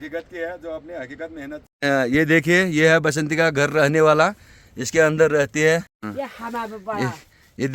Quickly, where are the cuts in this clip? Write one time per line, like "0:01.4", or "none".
0:01.7
0:05.5